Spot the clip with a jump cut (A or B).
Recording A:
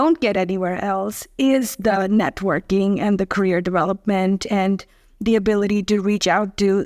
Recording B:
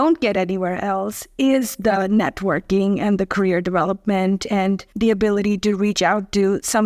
B